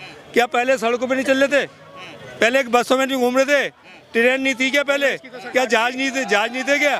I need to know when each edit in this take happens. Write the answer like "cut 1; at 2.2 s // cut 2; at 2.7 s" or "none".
none